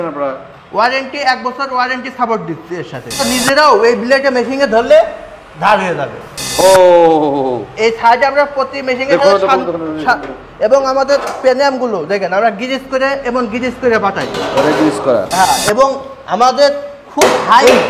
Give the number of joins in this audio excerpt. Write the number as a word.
one